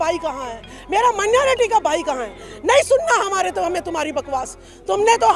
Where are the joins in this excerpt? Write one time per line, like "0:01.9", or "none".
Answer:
none